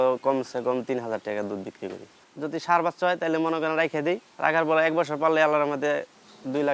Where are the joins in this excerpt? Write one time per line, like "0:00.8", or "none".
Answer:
0:02.1
0:04.3